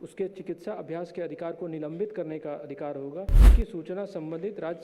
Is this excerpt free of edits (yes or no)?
no